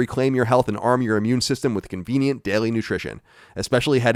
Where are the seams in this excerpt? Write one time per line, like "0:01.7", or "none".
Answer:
none